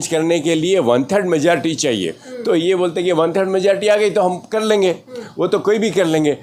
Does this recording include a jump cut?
no; 0 cuts

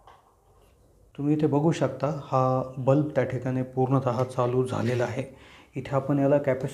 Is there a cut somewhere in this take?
yes; 1 cut; at 1.1 s

